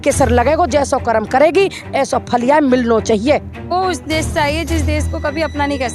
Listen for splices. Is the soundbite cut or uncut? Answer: cut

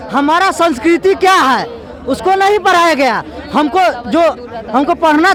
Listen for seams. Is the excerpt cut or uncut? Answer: uncut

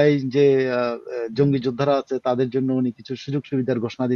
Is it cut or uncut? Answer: uncut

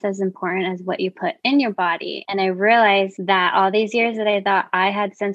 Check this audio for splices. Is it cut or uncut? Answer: cut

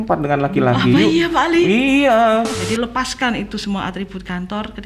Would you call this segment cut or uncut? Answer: cut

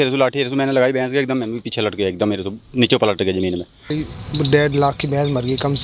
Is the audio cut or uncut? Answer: cut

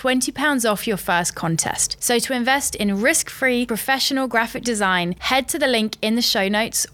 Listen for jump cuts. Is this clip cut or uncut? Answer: uncut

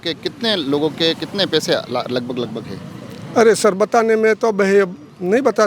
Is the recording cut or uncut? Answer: uncut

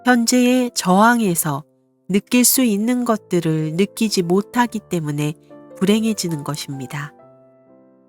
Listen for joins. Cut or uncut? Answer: cut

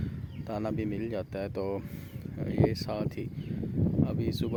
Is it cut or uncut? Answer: uncut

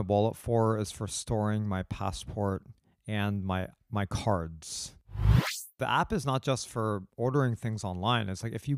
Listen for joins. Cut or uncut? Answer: cut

